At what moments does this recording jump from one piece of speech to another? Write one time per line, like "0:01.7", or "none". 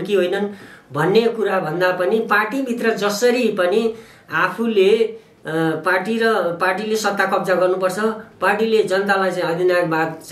none